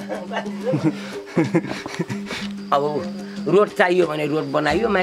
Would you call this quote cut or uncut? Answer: cut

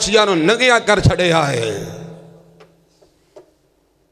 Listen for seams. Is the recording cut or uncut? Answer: uncut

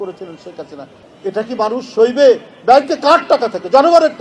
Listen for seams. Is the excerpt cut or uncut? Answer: cut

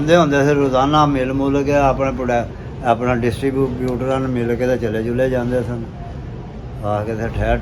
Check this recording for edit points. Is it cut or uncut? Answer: uncut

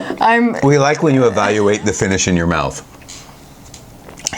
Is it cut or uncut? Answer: uncut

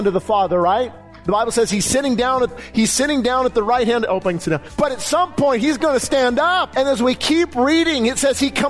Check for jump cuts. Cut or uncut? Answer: cut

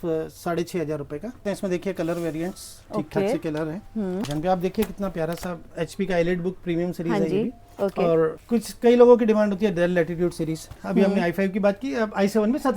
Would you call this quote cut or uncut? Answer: cut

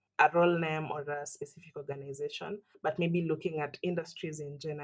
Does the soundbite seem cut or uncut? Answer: cut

